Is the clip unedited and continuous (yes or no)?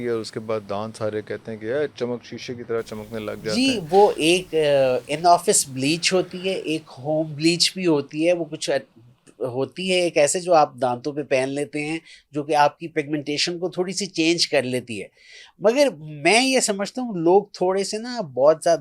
yes